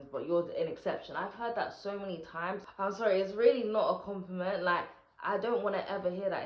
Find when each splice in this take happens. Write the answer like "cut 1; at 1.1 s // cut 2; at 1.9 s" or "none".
cut 1; at 2.7 s